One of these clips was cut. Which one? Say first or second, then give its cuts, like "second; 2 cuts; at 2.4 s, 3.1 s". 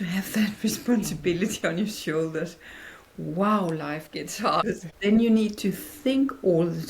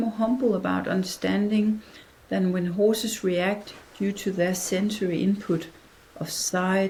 first; 1 cut; at 4.6 s